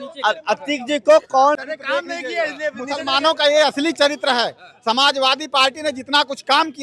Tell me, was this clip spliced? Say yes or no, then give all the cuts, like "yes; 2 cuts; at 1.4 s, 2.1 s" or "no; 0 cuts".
yes; 1 cut; at 1.6 s